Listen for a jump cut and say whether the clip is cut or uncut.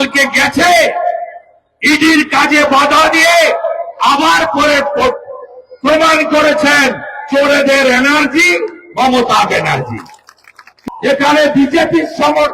cut